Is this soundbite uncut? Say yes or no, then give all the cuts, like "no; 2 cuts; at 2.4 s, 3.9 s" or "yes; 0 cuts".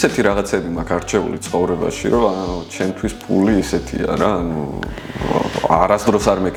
yes; 0 cuts